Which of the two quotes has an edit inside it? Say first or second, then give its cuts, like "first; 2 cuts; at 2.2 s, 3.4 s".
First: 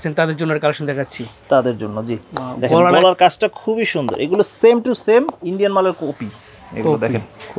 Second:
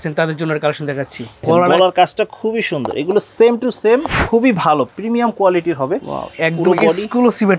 second; 2 cuts; at 1.4 s, 4.2 s